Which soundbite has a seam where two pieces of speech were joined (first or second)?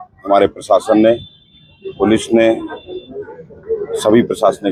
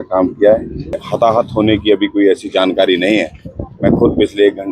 second